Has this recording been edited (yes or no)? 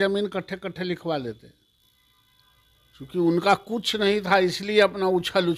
no